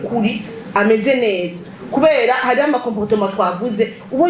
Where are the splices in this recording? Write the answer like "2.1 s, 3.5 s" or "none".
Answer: none